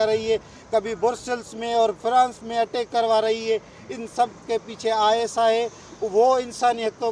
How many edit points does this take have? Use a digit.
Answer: 0